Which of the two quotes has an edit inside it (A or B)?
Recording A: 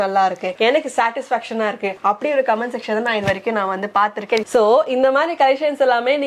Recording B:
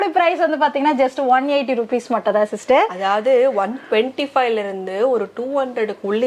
A